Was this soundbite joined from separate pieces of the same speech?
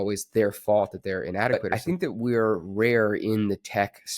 yes; 1 cut; at 2.2 s

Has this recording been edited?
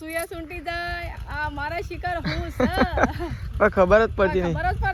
no; 0 cuts

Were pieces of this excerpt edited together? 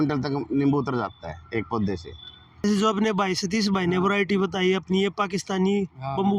yes; 1 cut; at 2.6 s

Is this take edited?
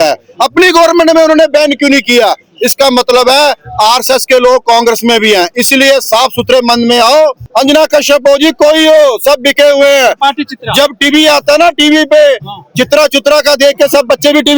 yes; 1 cut; at 7.4 s

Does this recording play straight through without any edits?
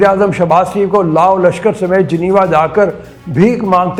yes; 0 cuts

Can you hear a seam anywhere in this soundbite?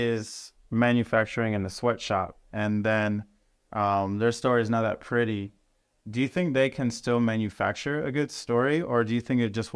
no; 0 cuts

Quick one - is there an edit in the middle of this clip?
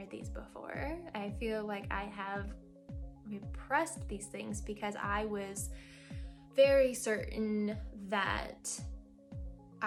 no; 0 cuts

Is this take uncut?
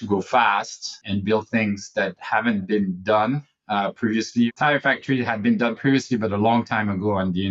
no; 2 cuts; at 1.0 s, 4.5 s

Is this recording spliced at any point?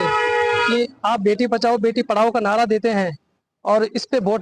no; 0 cuts

